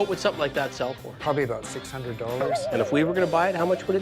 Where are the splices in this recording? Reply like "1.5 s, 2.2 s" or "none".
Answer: 1.1 s, 2.5 s